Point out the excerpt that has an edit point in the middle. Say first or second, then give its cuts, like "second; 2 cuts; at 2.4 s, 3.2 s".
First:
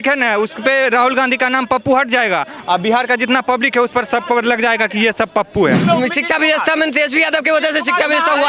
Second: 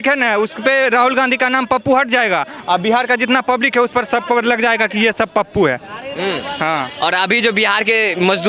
first; 1 cut; at 5.8 s